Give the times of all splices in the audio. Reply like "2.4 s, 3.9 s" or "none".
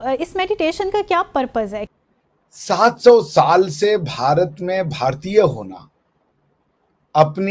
1.9 s